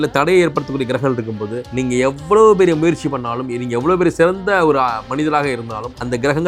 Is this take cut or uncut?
uncut